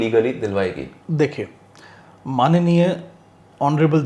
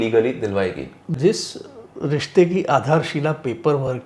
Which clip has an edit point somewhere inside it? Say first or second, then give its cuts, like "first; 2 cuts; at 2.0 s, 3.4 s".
second; 1 cut; at 1.2 s